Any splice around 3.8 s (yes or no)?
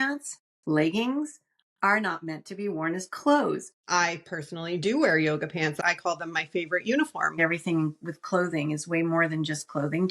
yes